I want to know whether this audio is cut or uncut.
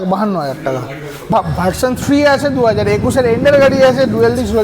cut